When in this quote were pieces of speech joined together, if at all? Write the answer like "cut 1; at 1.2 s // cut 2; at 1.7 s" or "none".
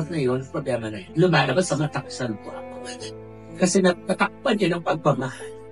cut 1; at 1.0 s